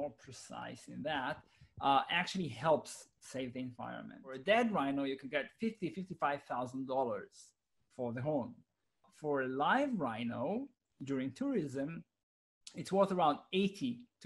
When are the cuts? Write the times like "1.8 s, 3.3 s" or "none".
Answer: 4.4 s